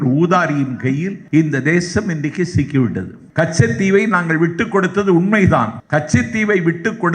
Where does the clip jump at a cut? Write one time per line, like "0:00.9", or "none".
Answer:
0:01.2
0:03.2
0:05.8